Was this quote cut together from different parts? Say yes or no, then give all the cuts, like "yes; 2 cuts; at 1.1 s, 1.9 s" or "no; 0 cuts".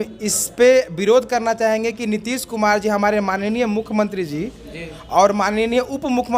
no; 0 cuts